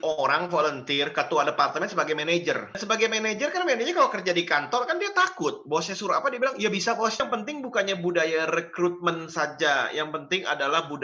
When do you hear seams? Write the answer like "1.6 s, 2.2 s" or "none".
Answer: 2.8 s, 7.2 s